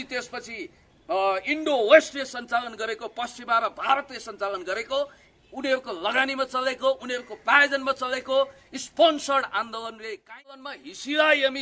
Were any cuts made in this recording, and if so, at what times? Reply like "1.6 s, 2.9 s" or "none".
10.6 s

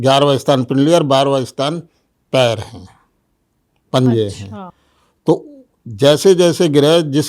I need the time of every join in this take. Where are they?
none

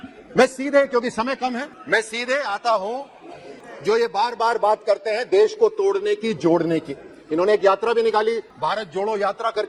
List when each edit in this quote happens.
none

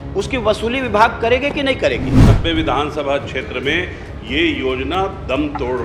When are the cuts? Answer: 2.3 s

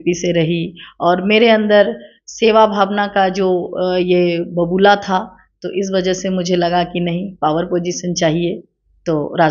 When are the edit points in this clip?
none

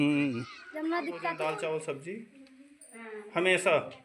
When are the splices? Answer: 1.2 s

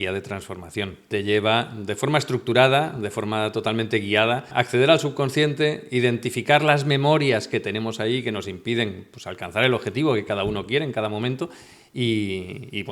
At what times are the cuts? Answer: 1.1 s, 4.5 s

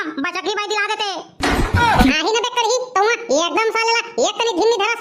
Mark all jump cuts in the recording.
2.1 s

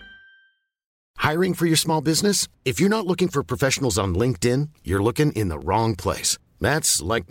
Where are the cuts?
0.9 s

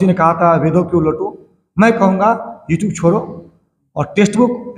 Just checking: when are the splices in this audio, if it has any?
none

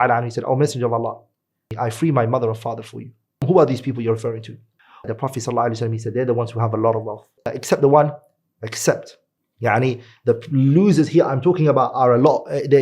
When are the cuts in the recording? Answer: 1.6 s, 3.4 s, 5.1 s, 7.5 s

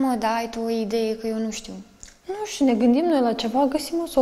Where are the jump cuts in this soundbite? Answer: none

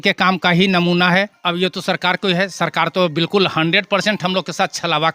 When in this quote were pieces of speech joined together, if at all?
1.3 s

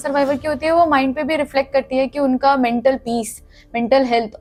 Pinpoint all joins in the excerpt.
none

